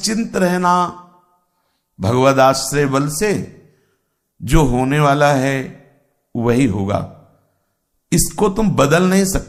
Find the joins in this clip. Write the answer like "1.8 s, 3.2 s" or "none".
none